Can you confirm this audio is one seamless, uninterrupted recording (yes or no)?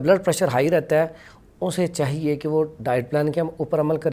yes